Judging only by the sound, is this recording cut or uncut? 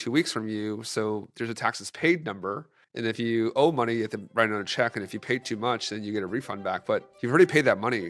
uncut